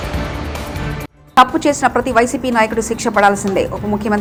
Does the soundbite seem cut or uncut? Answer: uncut